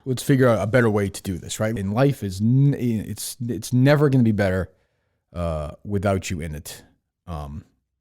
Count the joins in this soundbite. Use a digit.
1